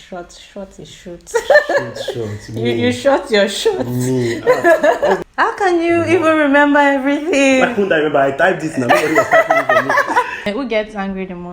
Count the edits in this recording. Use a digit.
2